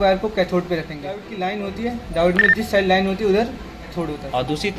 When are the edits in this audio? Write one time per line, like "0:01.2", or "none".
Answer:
0:01.3